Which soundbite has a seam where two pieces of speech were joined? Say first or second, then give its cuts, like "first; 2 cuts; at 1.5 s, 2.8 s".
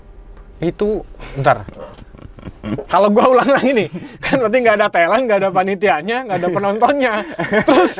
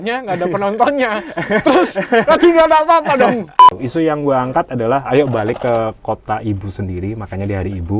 second; 1 cut; at 3.7 s